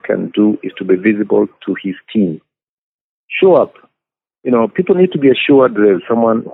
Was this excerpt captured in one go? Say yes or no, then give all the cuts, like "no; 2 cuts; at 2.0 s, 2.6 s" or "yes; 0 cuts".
yes; 0 cuts